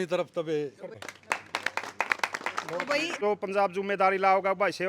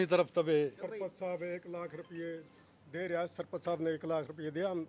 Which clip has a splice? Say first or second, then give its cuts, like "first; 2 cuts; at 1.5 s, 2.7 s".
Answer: first; 2 cuts; at 0.9 s, 3.2 s